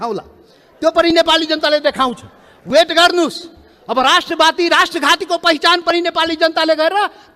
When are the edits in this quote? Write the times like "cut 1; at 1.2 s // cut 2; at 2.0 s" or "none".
none